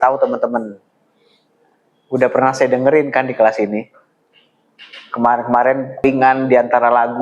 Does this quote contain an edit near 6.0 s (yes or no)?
yes